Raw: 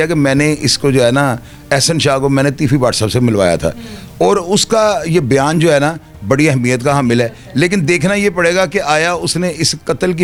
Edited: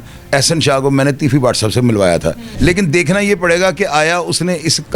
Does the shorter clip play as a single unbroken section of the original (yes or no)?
no